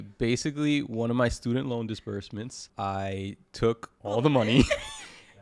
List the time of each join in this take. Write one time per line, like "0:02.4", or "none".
0:02.6
0:03.9